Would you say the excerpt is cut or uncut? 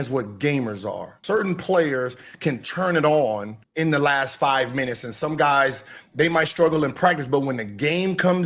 cut